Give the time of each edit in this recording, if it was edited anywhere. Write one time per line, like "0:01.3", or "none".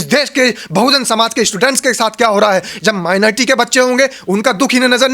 none